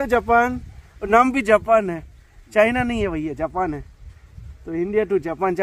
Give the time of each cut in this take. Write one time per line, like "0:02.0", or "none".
none